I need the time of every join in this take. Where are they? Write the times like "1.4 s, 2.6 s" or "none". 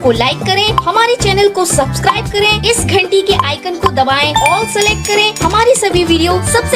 none